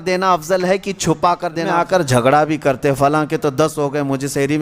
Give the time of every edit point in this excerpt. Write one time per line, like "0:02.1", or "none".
0:01.7